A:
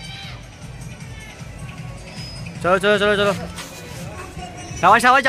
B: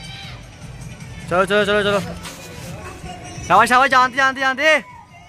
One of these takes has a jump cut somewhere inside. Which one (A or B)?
B